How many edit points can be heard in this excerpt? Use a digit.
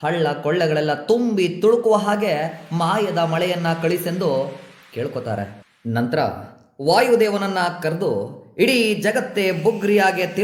0